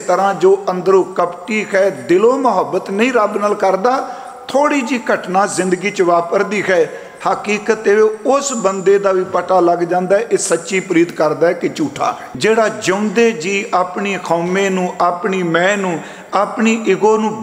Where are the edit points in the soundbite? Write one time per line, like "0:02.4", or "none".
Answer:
0:12.2